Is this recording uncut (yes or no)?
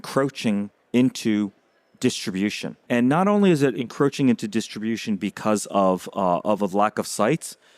no